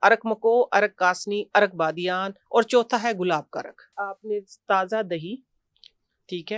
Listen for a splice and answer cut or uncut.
cut